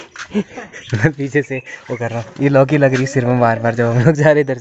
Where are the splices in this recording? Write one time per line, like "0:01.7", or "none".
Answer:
none